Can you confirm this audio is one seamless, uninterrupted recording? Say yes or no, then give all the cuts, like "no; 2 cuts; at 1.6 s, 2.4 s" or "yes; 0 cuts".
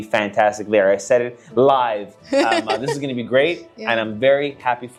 yes; 0 cuts